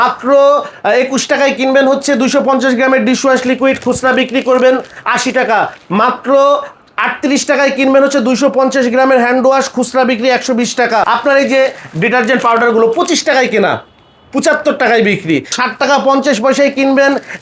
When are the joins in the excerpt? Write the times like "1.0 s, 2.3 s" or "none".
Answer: 11.0 s, 15.5 s